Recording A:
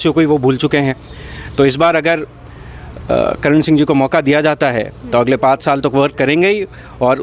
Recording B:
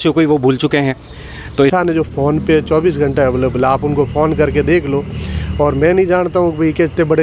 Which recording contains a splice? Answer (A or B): B